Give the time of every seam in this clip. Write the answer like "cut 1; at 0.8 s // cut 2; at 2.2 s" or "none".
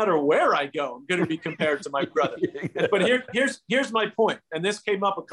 none